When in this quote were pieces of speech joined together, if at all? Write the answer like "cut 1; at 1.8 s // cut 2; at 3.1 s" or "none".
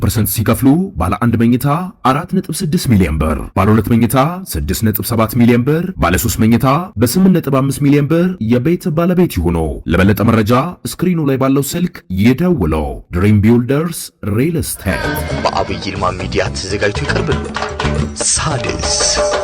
cut 1; at 15.0 s